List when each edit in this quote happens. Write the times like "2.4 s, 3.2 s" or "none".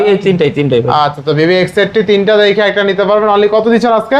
none